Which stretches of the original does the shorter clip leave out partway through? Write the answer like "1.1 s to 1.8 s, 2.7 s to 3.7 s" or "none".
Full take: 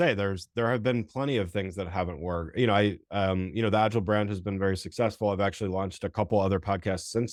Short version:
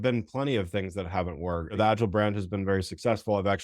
2.5 s to 3.7 s